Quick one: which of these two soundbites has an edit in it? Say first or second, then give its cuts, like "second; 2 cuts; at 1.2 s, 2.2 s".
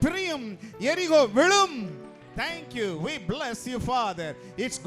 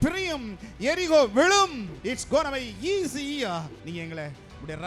second; 2 cuts; at 1.9 s, 3.8 s